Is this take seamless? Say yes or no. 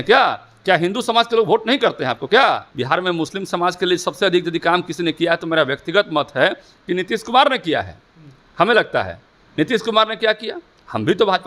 no